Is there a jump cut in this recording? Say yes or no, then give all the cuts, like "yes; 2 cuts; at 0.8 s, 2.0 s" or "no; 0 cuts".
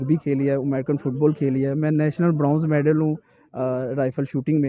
no; 0 cuts